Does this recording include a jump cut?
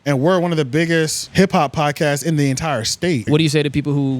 yes; 2 cuts; at 1.2 s, 3.3 s

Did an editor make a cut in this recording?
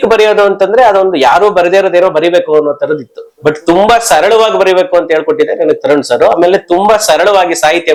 no; 0 cuts

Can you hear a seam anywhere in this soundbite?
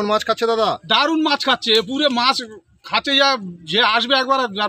no; 0 cuts

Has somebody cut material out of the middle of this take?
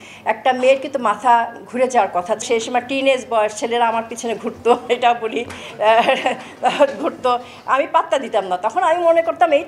yes; 1 cut; at 2.4 s

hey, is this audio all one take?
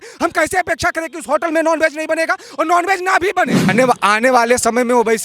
no; 1 cut; at 3.7 s

